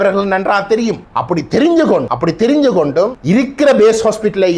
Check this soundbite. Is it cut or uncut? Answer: cut